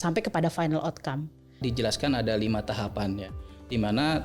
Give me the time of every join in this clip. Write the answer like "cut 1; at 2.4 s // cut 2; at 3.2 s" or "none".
cut 1; at 1.6 s